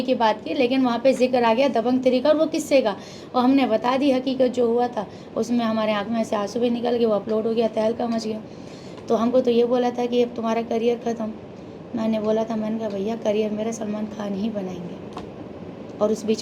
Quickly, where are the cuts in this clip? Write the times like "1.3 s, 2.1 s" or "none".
none